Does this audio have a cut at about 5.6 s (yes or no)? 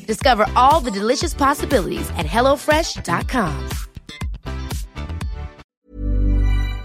yes